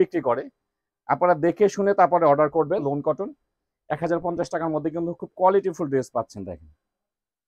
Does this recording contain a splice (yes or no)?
yes